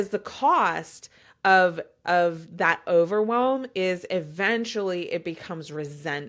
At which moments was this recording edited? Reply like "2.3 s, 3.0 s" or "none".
none